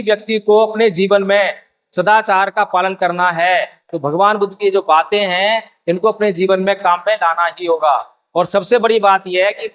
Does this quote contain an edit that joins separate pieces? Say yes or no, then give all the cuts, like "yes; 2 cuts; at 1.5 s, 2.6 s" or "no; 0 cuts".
yes; 1 cut; at 3.8 s